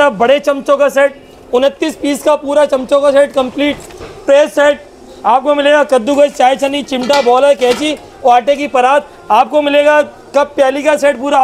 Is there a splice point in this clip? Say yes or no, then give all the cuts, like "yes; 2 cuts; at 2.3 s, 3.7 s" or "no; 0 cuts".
no; 0 cuts